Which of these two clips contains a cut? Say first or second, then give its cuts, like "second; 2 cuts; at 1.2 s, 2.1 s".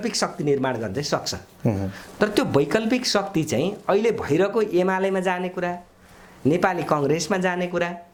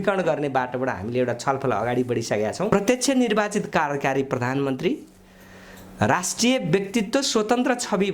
second; 1 cut; at 2.7 s